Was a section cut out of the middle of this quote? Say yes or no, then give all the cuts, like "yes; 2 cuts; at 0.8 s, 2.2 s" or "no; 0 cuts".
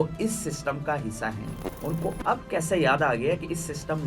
yes; 1 cut; at 1.6 s